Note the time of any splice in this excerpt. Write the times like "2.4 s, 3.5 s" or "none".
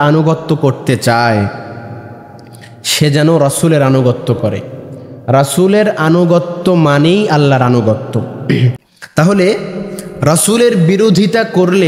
8.8 s